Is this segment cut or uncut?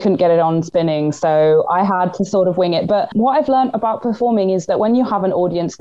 cut